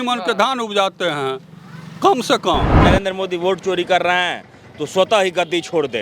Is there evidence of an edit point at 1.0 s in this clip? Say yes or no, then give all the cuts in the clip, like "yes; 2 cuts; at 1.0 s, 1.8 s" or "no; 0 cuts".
no; 1 cut; at 2.7 s